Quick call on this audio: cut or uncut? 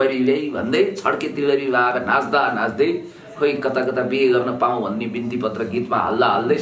uncut